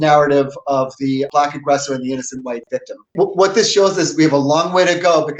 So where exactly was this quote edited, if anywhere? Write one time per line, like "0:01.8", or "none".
0:01.3
0:03.1